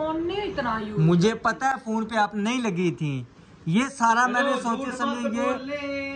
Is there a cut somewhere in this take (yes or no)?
no